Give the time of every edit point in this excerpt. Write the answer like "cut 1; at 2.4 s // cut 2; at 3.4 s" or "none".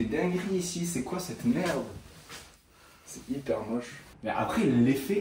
none